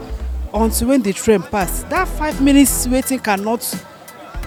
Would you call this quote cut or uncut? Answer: uncut